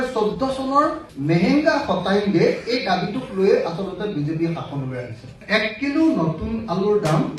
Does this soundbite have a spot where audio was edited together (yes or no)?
yes